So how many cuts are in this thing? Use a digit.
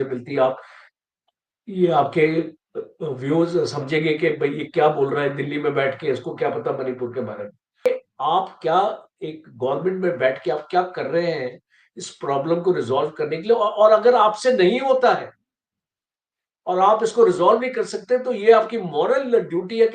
1